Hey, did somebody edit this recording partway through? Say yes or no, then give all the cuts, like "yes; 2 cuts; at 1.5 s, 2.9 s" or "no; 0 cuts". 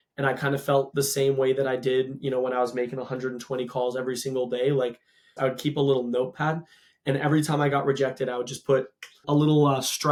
no; 0 cuts